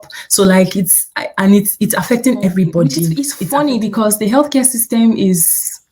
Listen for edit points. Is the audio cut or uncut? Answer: cut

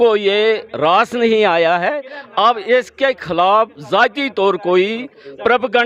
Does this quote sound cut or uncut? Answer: uncut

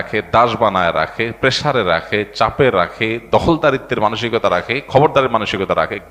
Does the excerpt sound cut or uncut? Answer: uncut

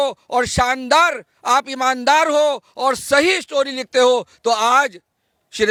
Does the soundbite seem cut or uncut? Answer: uncut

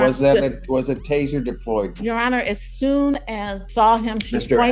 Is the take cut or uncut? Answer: cut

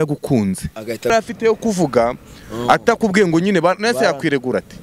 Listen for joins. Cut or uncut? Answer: cut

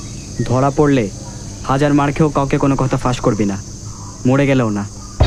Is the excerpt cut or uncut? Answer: uncut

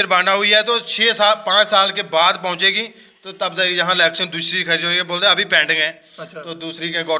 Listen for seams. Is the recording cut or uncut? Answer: uncut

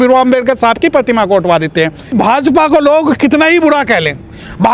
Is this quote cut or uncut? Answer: cut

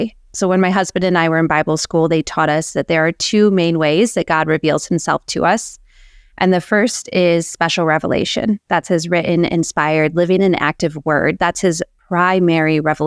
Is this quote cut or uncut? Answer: uncut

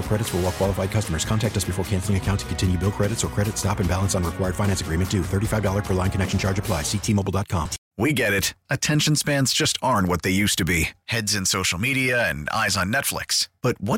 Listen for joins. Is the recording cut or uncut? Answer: cut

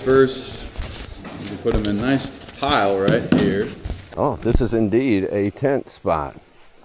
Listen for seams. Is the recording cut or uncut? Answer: cut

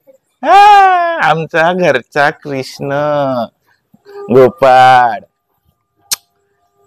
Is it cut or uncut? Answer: uncut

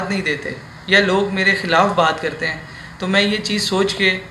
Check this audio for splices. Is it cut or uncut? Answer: uncut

